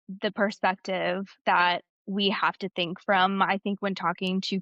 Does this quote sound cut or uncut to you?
uncut